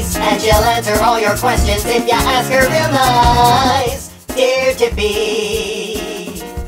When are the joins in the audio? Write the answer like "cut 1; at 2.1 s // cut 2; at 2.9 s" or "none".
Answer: cut 1; at 1.7 s